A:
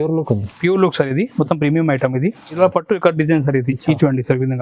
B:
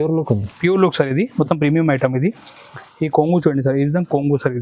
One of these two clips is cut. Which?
A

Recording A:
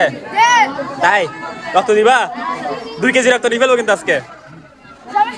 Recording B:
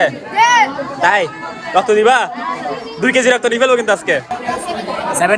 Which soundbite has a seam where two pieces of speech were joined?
B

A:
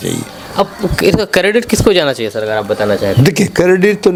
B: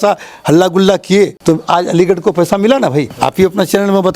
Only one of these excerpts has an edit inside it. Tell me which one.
B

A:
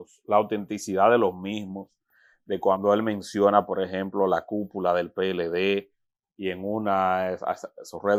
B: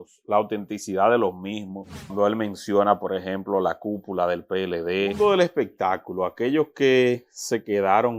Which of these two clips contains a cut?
B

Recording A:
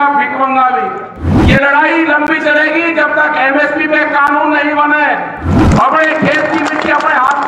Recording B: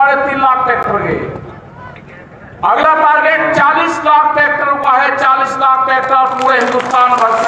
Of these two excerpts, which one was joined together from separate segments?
A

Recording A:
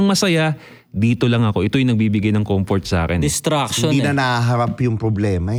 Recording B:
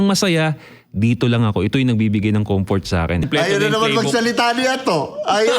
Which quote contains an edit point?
B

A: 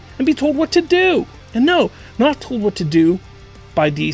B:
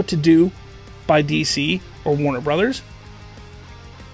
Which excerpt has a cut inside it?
A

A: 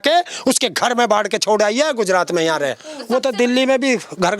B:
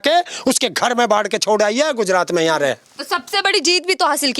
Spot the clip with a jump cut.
A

